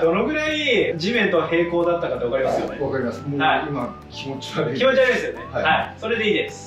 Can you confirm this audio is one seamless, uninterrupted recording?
yes; 0 cuts

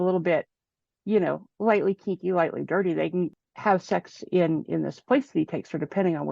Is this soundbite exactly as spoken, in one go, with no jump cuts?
no; 1 cut; at 3.3 s

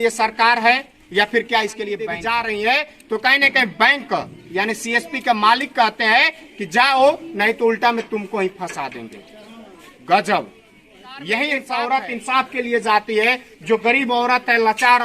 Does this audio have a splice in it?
yes; 2 cuts; at 2.1 s, 11.6 s

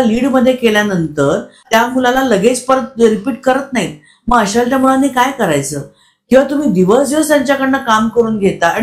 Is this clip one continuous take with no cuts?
no; 1 cut; at 1.6 s

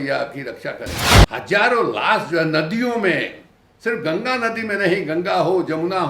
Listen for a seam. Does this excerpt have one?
yes; 1 cut; at 1.1 s

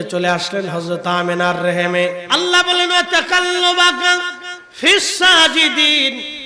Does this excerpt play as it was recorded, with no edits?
no; 1 cut; at 2.2 s

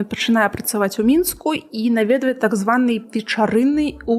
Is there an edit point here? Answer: no; 0 cuts

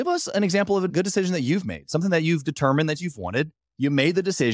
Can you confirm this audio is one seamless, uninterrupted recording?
no; 1 cut; at 0.9 s

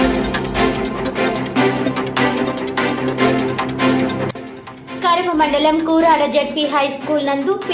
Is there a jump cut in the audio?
no; 0 cuts

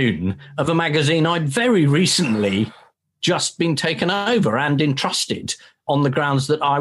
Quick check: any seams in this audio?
no; 0 cuts

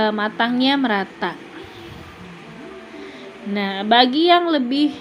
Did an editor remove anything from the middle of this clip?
no; 0 cuts

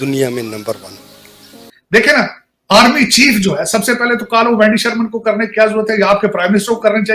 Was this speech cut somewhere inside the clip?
yes; 1 cut; at 1.6 s

